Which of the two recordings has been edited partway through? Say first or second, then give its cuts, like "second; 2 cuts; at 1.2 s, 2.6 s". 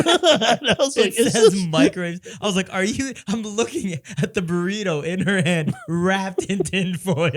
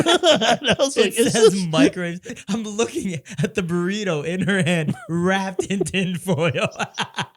second; 1 cut; at 2.3 s